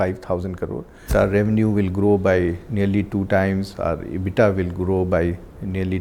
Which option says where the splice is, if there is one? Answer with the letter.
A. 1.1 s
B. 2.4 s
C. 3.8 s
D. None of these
A